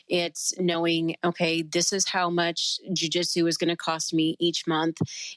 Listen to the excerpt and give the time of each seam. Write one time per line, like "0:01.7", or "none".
none